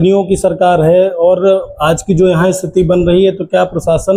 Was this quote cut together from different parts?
no; 0 cuts

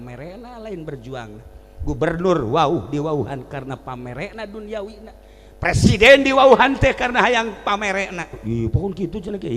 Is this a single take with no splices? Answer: no; 1 cut; at 8.4 s

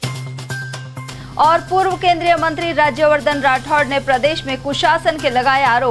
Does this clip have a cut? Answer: yes; 1 cut; at 1.0 s

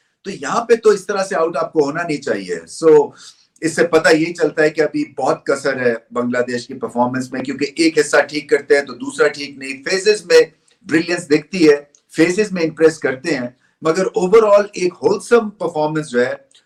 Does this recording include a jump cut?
no; 0 cuts

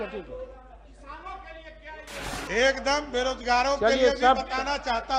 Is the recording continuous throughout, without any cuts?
yes; 0 cuts

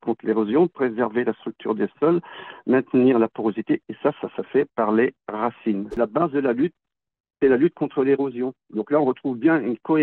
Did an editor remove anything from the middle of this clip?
yes; 1 cut; at 6.0 s

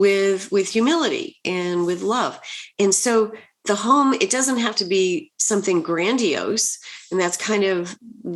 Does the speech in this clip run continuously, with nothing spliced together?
no; 1 cut; at 2.6 s

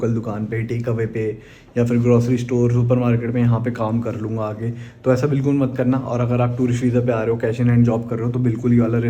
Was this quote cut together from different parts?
no; 0 cuts

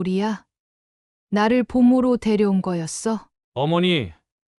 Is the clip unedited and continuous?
no; 1 cut; at 3.3 s

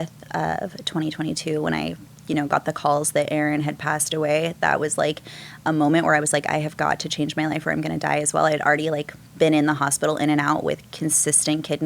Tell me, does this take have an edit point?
no; 0 cuts

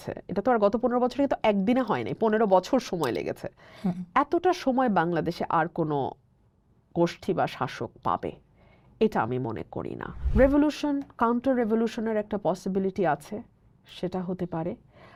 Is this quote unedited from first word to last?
yes; 0 cuts

